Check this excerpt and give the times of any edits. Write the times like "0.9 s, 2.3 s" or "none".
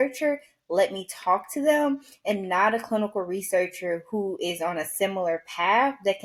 none